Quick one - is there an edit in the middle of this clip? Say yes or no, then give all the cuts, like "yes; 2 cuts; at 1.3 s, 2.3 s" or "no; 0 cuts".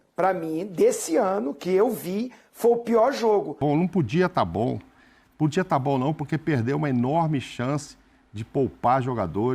yes; 1 cut; at 3.6 s